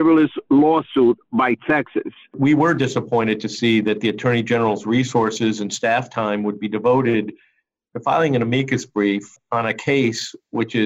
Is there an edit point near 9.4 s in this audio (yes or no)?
yes